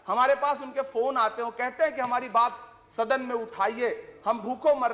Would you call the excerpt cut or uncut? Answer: uncut